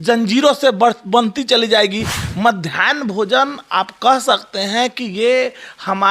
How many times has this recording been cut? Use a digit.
1